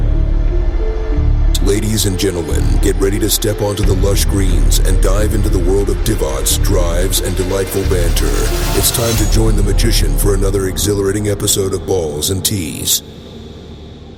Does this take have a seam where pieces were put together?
no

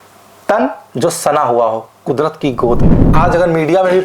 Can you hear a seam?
yes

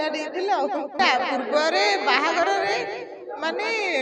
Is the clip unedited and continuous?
no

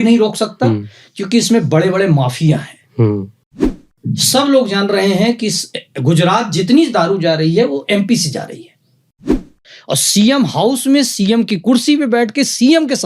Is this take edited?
yes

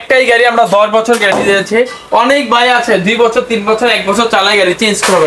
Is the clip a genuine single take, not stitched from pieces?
yes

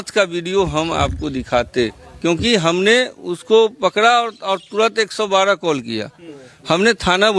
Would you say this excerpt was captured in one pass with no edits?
yes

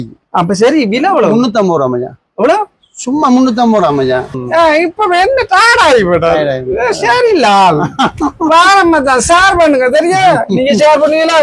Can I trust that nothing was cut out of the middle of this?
no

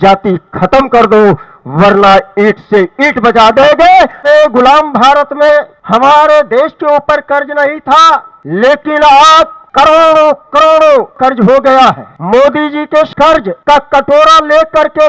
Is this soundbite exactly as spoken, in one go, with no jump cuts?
no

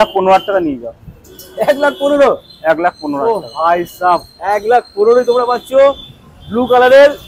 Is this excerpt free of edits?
yes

